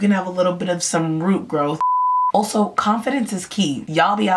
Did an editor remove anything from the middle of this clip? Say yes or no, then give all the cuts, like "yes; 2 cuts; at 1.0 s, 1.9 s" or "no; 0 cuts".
yes; 1 cut; at 2.0 s